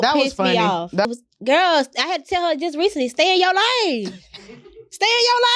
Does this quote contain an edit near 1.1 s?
yes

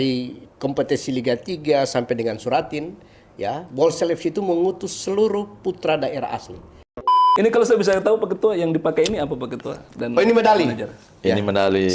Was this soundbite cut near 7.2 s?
yes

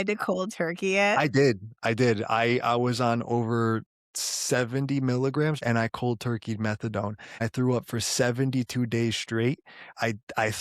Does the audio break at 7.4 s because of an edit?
yes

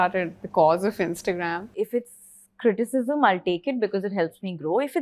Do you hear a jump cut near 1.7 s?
yes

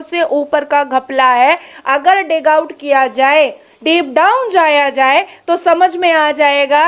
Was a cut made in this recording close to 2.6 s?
no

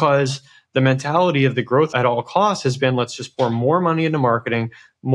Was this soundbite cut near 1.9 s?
yes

